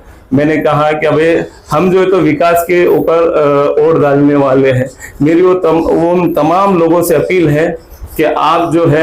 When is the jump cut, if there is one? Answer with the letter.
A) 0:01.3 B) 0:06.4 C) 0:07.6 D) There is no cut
D